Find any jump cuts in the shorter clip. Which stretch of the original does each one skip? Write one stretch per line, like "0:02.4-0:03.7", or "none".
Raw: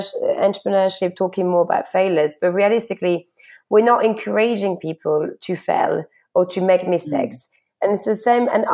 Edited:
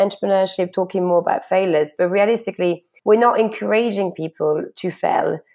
0:03.3-0:03.5

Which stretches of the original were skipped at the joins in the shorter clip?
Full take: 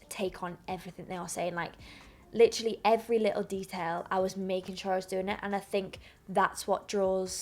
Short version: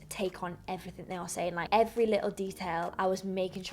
0:01.7-0:02.8

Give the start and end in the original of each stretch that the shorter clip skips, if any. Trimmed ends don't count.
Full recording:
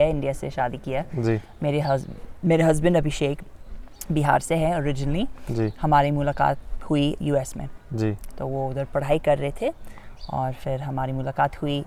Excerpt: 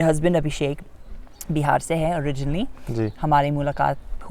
none

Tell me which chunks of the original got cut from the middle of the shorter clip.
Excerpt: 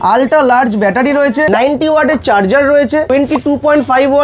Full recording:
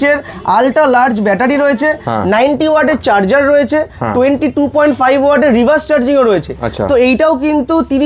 0:02.0-0:02.3
0:03.9-0:04.2

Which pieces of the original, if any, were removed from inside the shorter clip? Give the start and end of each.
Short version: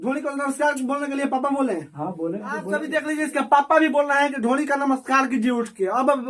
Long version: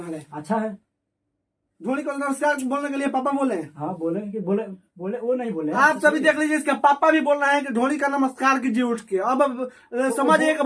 0:04.5-0:06.1

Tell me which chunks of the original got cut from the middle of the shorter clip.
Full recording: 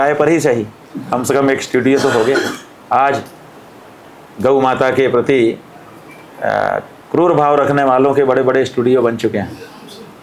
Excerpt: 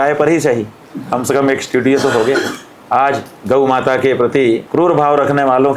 0:03.3-0:04.3
0:05.6-0:07.1

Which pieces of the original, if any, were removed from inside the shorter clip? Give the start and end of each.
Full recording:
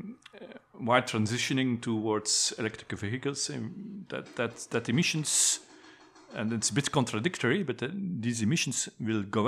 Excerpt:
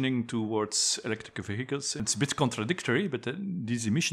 0:03.5-0:06.6

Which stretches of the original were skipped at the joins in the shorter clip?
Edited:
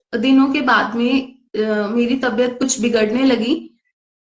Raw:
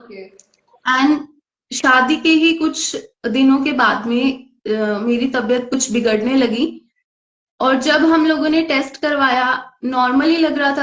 none

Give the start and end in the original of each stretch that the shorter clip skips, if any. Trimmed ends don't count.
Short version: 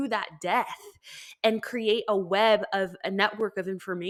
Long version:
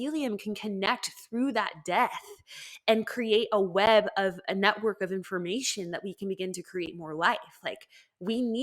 none

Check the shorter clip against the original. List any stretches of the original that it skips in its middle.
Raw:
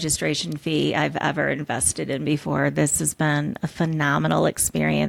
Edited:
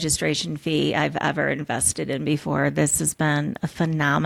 none

